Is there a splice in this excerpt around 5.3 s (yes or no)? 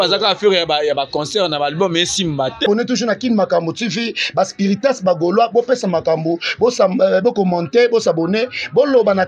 no